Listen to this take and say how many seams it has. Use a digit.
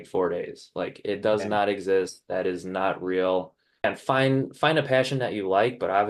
1